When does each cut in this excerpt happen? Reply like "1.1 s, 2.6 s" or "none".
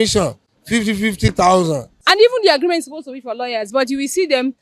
1.9 s